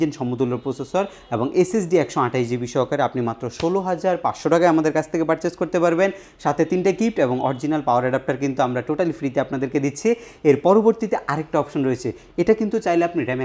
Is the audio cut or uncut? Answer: uncut